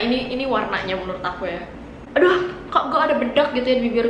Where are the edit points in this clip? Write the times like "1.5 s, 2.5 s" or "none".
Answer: 2.0 s